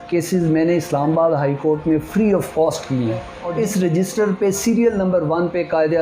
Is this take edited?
yes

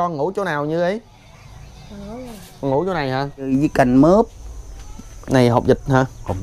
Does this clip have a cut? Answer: yes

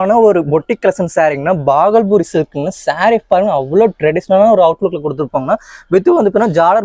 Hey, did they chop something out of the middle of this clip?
no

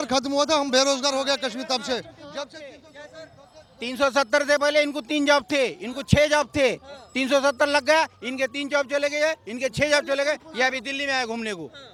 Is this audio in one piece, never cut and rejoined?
yes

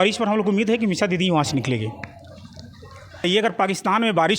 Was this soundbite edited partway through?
yes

